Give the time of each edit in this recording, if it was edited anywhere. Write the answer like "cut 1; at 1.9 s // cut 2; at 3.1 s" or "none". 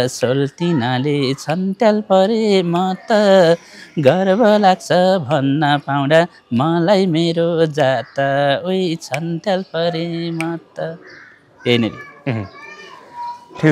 none